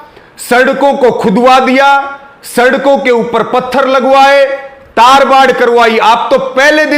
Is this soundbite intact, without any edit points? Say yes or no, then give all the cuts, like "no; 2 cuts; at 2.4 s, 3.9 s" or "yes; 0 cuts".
yes; 0 cuts